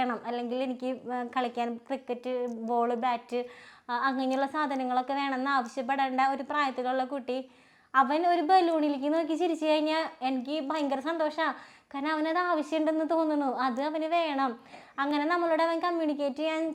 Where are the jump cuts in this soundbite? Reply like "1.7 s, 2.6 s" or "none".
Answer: none